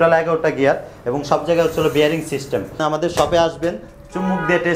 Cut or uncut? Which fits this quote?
cut